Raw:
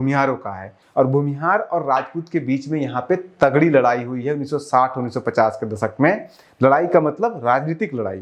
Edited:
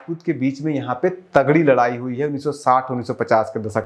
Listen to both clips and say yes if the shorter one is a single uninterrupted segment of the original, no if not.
yes